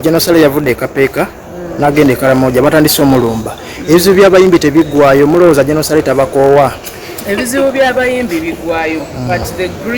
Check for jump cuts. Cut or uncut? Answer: uncut